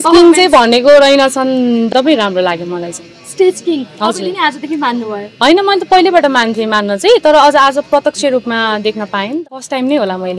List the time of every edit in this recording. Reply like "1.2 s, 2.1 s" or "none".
1.9 s, 9.4 s